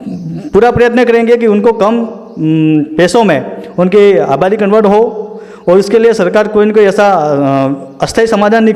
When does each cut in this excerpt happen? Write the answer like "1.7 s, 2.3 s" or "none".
none